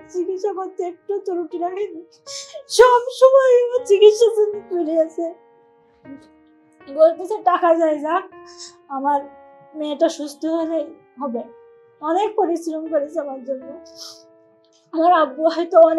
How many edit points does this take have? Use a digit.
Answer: 0